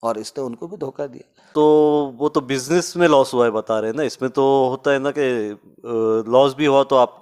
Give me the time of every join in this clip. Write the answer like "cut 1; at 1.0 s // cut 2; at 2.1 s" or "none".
cut 1; at 1.4 s